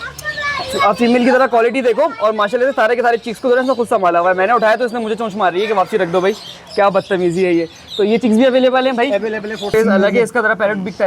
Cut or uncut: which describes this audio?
cut